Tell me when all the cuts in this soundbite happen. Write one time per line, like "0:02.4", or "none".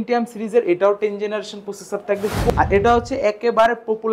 0:02.5